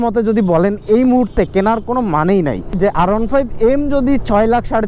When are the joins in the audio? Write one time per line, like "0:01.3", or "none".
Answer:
0:02.8